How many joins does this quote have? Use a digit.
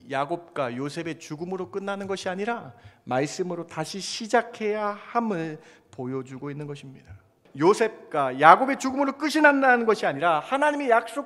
1